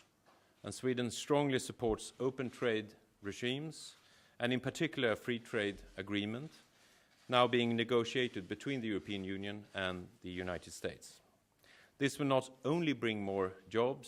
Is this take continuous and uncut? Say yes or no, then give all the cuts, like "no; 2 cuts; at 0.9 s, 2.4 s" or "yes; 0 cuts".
yes; 0 cuts